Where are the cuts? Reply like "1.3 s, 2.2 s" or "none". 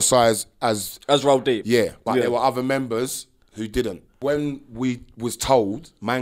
4.1 s